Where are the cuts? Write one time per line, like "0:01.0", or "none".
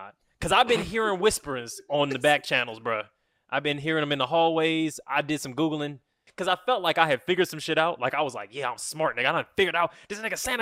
0:06.3